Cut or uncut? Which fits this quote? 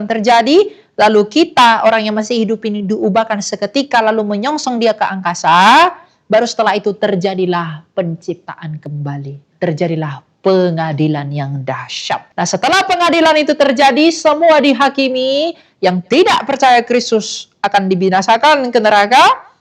cut